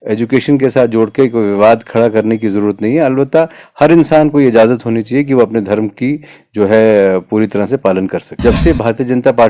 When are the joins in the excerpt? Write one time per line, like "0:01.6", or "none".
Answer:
0:08.3